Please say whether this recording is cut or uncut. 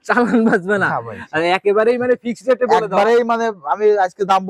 uncut